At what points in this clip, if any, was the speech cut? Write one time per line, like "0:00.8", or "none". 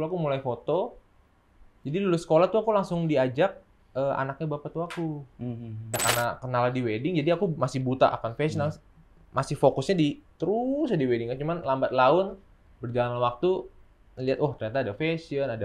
0:05.8